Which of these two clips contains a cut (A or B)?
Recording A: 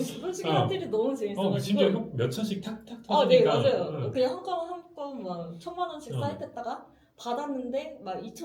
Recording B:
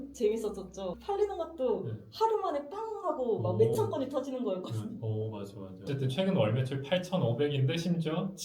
B